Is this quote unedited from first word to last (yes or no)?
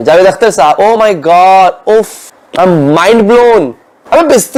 yes